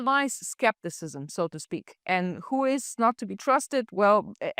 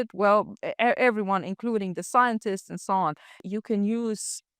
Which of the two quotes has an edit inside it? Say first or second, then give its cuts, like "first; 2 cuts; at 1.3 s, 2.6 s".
second; 1 cut; at 3.4 s